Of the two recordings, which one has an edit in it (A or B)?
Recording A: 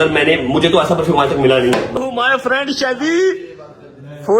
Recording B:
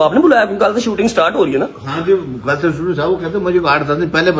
A